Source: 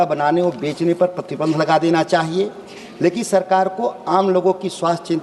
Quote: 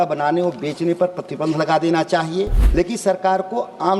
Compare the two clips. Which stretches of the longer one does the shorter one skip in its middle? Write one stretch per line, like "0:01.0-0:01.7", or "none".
0:02.6-0:02.9